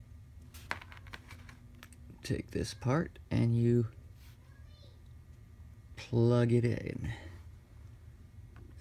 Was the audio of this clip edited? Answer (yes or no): yes